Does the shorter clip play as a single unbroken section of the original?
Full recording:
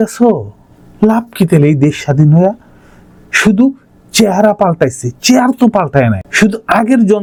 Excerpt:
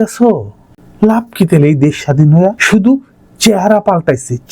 no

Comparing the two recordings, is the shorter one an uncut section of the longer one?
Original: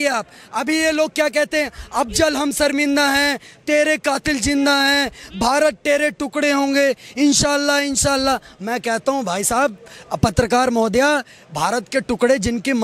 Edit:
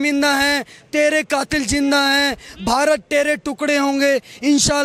yes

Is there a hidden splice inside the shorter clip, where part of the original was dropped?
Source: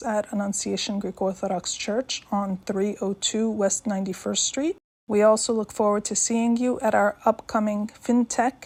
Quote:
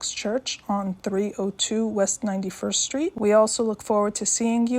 yes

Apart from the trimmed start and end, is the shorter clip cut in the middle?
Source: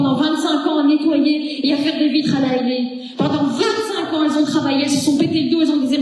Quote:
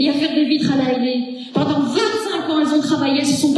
no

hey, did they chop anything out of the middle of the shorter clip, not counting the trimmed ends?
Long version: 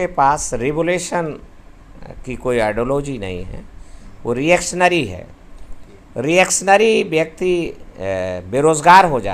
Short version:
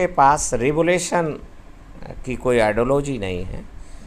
no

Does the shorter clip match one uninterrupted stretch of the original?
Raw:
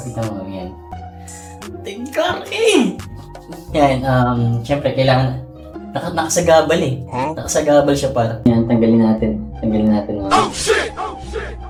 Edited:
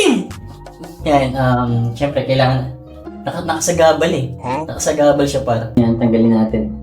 yes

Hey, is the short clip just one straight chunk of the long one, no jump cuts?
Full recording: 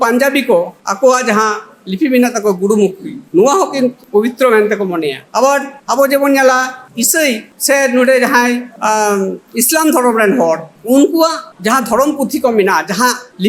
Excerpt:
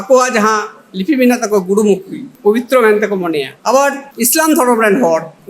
no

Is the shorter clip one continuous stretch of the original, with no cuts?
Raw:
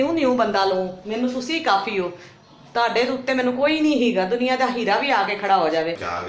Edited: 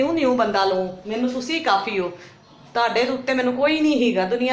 yes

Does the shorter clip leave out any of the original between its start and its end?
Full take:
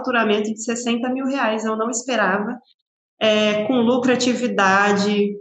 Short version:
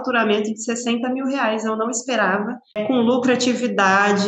yes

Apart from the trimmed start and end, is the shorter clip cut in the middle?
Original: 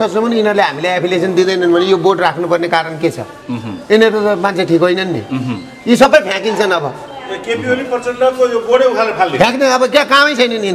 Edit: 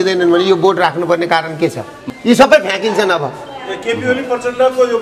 yes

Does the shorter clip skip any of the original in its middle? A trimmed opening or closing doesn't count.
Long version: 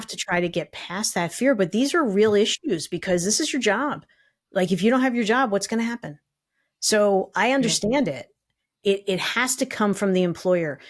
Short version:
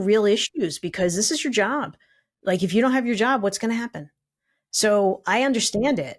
no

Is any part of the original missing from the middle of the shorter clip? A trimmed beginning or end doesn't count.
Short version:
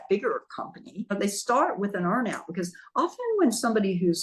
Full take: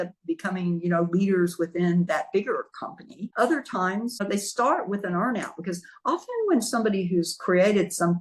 yes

